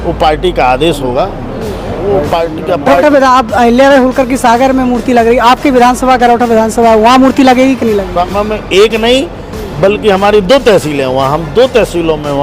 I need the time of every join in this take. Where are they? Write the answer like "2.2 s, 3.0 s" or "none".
2.9 s, 8.2 s